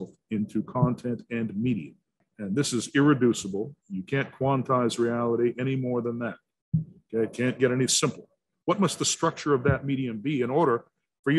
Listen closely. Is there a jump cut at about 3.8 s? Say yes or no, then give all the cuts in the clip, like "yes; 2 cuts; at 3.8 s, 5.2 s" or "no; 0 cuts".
no; 2 cuts; at 2.3 s, 8.4 s